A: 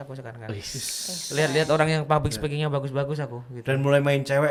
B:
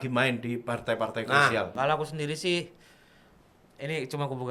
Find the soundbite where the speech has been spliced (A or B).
B